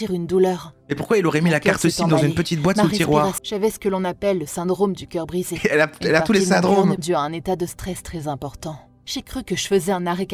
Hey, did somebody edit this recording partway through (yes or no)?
yes